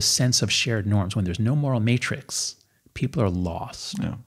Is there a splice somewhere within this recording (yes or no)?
no